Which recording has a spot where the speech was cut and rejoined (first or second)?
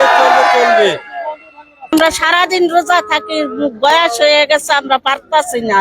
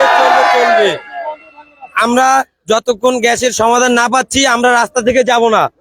first